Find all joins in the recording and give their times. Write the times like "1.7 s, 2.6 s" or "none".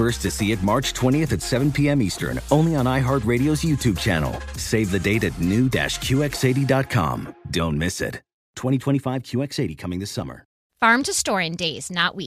10.6 s

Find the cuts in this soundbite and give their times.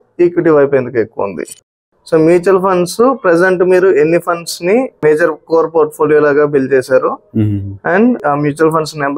1.7 s, 5.0 s

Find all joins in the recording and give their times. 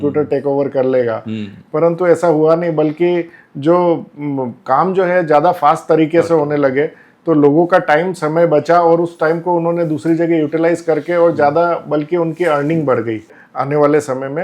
13.4 s

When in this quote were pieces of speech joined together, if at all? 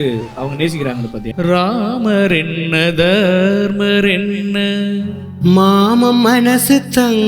1.2 s

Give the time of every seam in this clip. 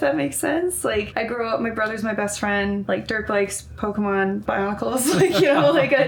1.1 s, 2.8 s, 4.4 s

